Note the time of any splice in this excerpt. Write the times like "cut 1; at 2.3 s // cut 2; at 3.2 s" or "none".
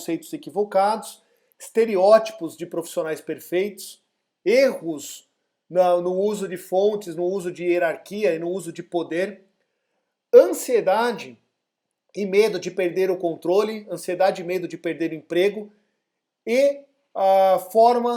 none